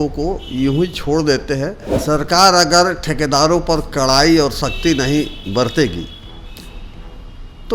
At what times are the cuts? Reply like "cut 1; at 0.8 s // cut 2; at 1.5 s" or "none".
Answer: cut 1; at 1.9 s